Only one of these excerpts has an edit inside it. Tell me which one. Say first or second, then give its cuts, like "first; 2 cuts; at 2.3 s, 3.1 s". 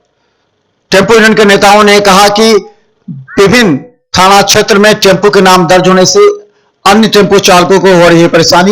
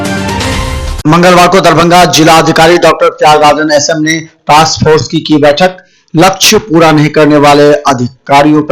second; 1 cut; at 0.9 s